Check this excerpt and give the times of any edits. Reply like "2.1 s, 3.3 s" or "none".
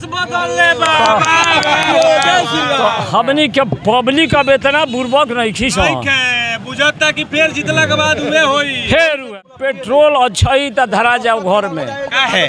9.4 s